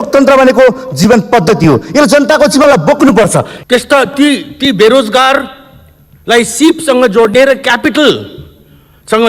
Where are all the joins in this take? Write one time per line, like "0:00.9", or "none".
0:03.5

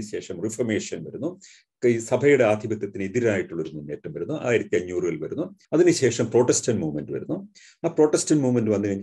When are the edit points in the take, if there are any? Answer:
0:05.6

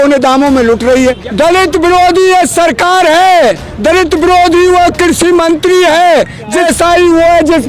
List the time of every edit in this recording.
0:01.2
0:06.6

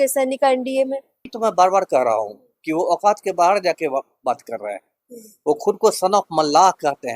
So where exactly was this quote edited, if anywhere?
0:01.2

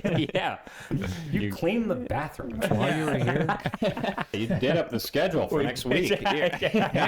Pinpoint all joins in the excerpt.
0:04.4

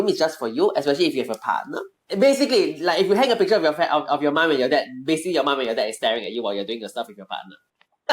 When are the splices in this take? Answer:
0:01.9

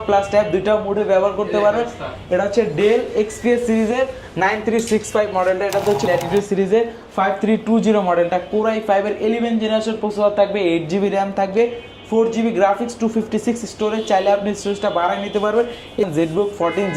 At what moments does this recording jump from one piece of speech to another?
0:06.1
0:16.1

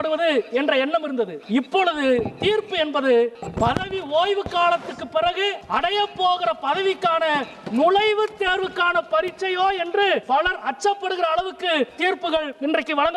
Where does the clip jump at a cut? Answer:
0:01.4
0:03.4
0:05.6
0:10.2
0:12.2

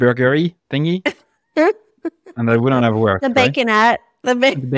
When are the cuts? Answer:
none

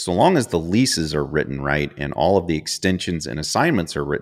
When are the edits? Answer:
none

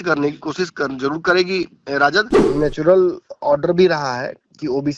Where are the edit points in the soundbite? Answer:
0:02.4

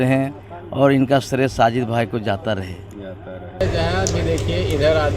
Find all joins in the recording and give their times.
0:03.6

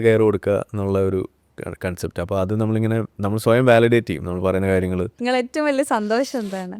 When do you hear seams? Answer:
0:05.1

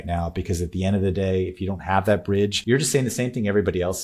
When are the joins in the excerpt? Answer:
0:02.6

